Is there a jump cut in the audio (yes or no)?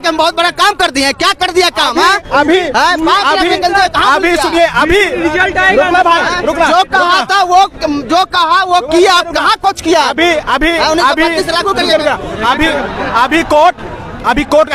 no